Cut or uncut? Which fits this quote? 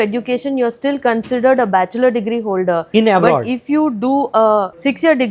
uncut